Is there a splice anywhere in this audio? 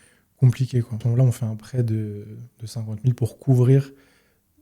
yes; 1 cut; at 1.1 s

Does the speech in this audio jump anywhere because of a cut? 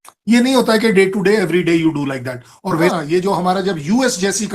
yes; 1 cut; at 2.9 s

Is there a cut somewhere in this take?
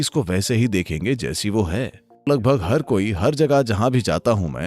yes; 1 cut; at 2.0 s

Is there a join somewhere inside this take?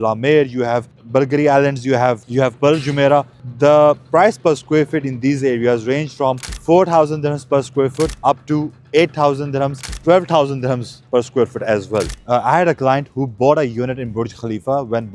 yes; 7 cuts; at 0.9 s, 2.2 s, 3.4 s, 6.5 s, 8.2 s, 9.9 s, 12.2 s

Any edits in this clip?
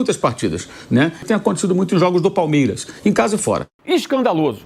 yes; 2 cuts; at 1.2 s, 3.7 s

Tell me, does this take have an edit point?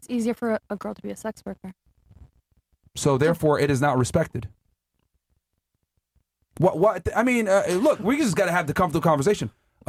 no; 0 cuts

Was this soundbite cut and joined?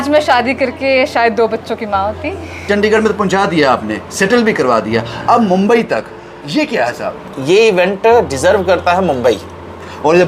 yes; 2 cuts; at 2.6 s, 7.3 s

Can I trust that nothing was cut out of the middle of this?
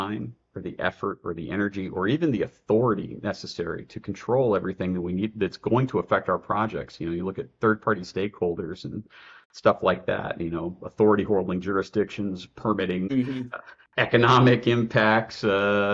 no; 1 cut; at 13.5 s

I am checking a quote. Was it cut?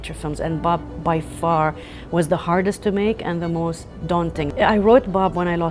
yes; 1 cut; at 4.5 s

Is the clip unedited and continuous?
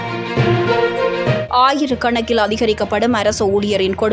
no; 1 cut; at 1.5 s

